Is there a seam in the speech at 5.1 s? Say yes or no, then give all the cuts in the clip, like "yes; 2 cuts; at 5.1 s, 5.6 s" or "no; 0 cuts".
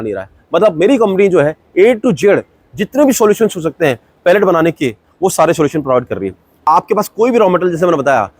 no; 1 cut; at 6.5 s